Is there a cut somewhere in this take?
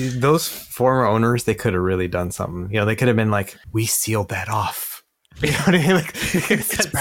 yes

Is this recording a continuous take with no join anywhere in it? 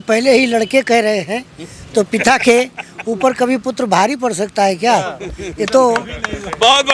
yes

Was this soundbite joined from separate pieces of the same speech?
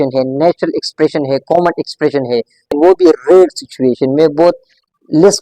yes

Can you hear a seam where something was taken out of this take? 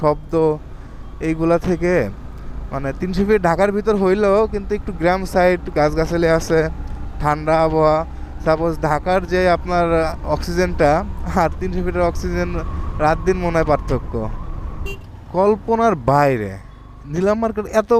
yes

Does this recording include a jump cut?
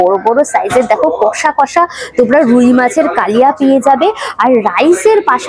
no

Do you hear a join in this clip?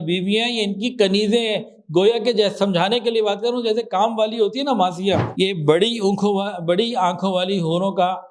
yes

